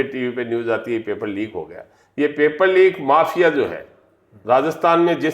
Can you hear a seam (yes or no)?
no